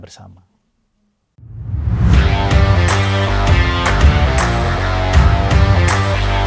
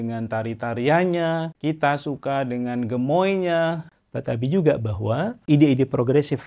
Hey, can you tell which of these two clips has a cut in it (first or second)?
second